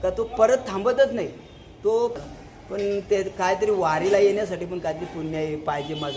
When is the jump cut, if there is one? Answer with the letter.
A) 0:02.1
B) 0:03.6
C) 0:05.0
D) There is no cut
A